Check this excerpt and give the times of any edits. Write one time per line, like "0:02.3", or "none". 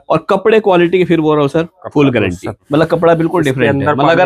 0:02.6